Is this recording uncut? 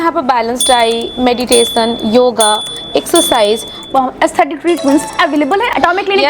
no; 2 cuts; at 3.8 s, 5.1 s

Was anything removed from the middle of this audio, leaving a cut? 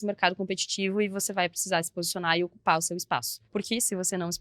yes; 1 cut; at 3.4 s

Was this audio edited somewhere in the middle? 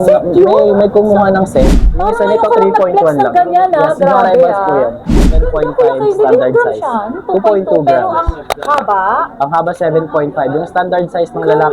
yes; 2 cuts; at 1.8 s, 5.5 s

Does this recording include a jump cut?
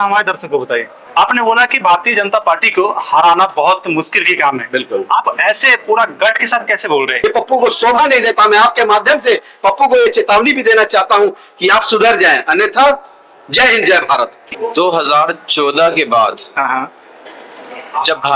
yes; 3 cuts; at 1.0 s, 7.1 s, 14.4 s

